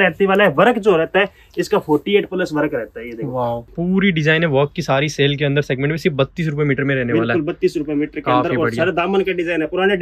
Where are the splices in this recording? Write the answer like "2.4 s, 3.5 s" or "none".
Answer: 3.7 s